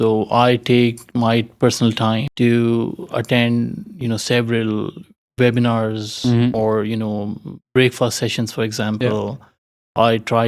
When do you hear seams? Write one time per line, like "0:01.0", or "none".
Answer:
0:02.3